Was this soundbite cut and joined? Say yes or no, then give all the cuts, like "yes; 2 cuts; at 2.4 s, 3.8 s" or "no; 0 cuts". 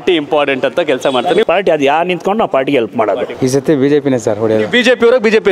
yes; 2 cuts; at 1.4 s, 3.3 s